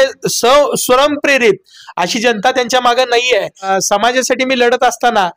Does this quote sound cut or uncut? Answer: cut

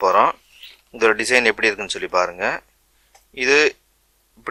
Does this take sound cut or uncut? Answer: uncut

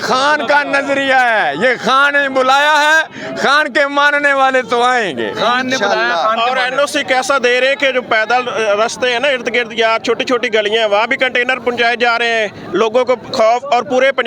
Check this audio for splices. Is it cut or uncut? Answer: uncut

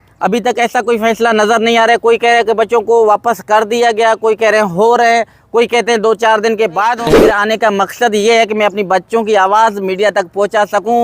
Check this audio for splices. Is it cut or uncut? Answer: cut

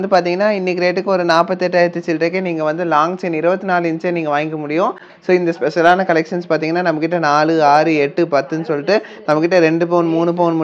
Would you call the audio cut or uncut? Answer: uncut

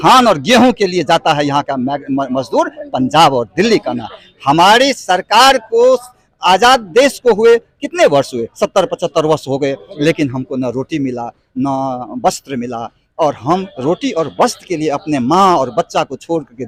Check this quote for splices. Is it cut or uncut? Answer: uncut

